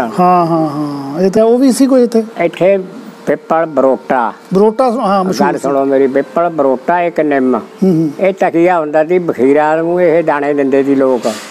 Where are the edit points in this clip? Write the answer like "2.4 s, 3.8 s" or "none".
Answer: 1.4 s